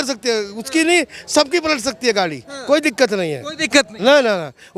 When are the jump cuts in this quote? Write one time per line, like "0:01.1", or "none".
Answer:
none